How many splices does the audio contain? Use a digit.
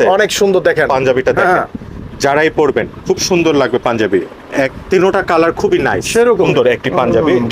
2